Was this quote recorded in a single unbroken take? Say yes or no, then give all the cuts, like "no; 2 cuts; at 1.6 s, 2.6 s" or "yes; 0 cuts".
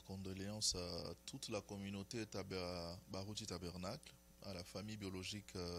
yes; 0 cuts